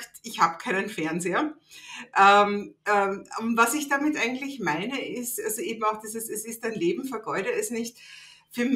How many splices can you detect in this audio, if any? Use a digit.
0